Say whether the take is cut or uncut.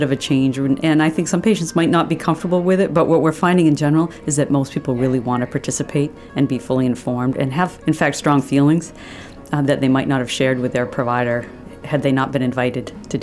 uncut